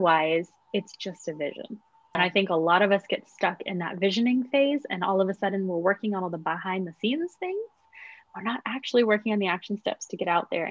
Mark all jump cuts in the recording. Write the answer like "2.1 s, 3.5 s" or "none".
2.2 s